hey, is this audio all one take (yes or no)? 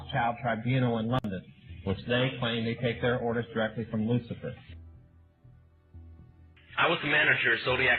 no